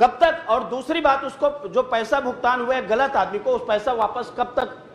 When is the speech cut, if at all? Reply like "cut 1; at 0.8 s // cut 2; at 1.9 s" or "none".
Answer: none